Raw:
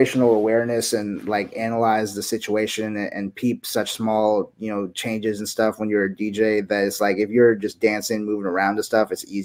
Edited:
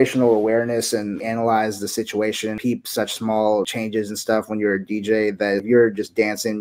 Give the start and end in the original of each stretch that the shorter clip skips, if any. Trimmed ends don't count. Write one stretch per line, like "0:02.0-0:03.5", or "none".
0:01.2-0:01.5
0:02.9-0:03.3
0:04.5-0:05.0
0:06.9-0:07.3